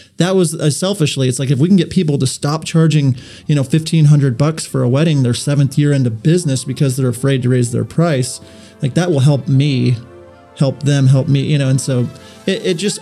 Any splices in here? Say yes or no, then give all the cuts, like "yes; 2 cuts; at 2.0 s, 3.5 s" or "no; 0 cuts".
no; 0 cuts